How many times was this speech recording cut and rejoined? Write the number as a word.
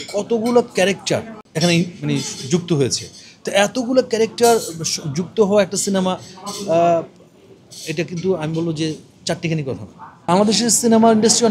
two